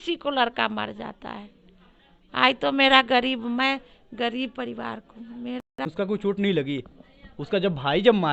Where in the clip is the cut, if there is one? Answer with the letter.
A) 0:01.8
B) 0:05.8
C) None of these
B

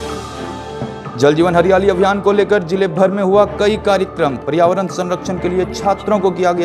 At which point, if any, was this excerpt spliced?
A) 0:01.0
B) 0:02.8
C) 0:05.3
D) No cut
A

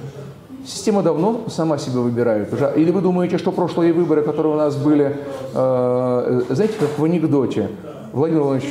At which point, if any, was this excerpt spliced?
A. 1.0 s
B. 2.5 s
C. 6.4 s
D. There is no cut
D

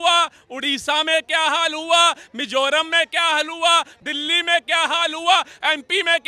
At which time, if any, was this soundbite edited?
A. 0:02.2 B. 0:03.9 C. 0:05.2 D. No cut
B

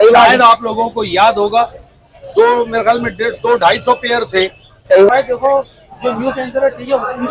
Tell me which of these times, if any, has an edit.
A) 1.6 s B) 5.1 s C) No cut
B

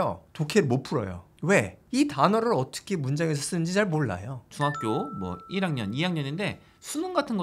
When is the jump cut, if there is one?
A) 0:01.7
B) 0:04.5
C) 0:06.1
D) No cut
B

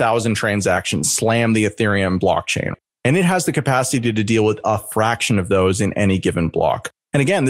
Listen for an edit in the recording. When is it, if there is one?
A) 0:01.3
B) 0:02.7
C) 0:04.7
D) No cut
B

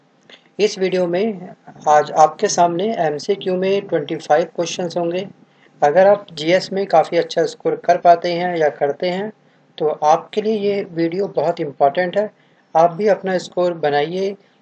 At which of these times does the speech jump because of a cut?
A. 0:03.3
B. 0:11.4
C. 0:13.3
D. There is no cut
D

